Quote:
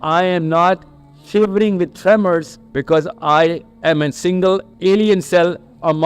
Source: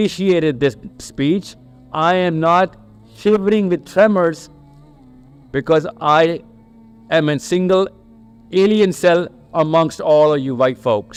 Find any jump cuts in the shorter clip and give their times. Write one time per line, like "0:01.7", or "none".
0:02.6
0:03.7
0:04.7